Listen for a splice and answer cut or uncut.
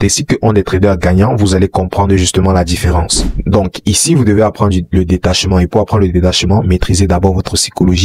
cut